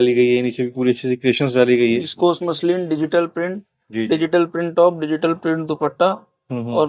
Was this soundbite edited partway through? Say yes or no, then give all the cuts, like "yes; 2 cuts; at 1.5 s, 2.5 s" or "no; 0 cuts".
yes; 1 cut; at 2.1 s